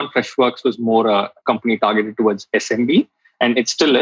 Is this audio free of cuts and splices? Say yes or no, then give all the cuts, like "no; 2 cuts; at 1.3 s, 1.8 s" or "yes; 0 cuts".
no; 1 cut; at 1.3 s